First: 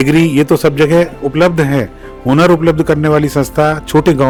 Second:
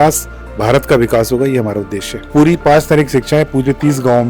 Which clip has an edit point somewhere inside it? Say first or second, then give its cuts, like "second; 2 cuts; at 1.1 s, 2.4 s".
second; 1 cut; at 2.3 s